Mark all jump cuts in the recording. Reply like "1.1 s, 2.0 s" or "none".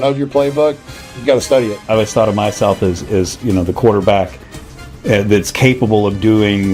1.8 s